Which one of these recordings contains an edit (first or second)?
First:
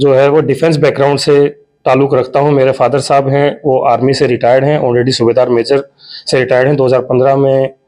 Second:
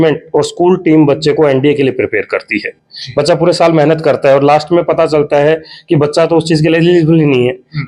second